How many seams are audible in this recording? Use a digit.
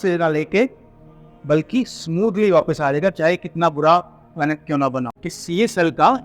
1